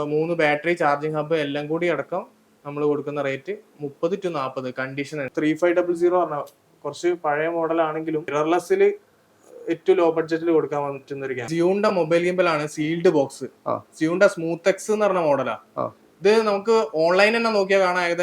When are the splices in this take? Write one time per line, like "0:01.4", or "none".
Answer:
0:05.3
0:08.3
0:11.4